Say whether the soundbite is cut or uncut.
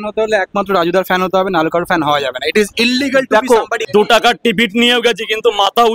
cut